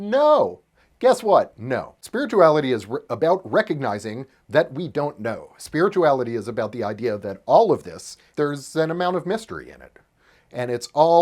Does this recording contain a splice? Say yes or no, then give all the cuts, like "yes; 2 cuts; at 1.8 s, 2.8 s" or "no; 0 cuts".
yes; 2 cuts; at 2.0 s, 8.3 s